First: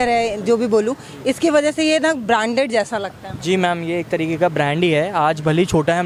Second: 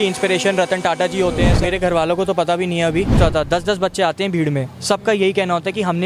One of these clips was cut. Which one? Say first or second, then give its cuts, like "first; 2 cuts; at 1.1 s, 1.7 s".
second; 2 cuts; at 1.5 s, 3.2 s